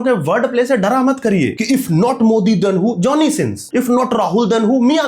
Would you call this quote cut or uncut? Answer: cut